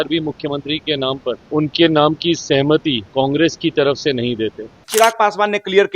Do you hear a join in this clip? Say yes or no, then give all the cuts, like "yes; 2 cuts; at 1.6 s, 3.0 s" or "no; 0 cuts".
yes; 3 cuts; at 1.4 s, 3.0 s, 4.8 s